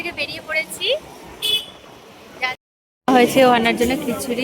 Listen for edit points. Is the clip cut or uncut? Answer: cut